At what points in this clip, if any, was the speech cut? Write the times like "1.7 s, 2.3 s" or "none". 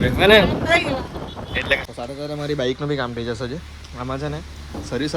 1.8 s